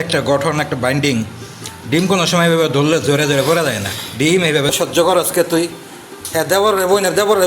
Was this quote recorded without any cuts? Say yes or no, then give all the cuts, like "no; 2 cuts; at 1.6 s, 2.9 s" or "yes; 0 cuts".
no; 1 cut; at 4.7 s